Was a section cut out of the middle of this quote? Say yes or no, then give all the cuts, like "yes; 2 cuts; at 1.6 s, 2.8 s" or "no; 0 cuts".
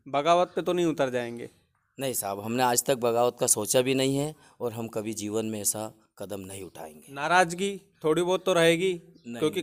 no; 0 cuts